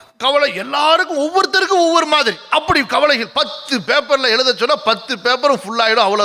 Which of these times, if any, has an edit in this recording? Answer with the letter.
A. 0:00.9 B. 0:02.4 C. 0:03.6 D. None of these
D